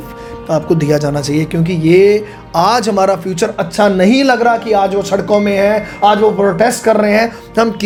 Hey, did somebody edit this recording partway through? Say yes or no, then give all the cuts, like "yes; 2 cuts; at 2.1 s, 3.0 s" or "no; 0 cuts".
no; 0 cuts